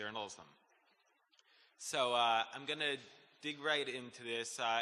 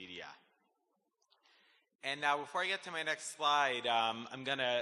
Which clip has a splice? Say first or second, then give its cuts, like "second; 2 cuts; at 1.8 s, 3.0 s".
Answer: first; 1 cut; at 3.2 s